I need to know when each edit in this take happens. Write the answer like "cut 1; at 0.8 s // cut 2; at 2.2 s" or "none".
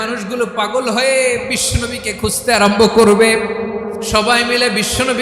cut 1; at 4.1 s